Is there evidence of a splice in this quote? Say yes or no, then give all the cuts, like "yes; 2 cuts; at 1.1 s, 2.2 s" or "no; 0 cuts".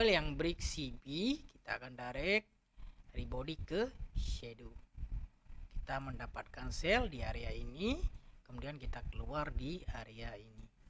no; 0 cuts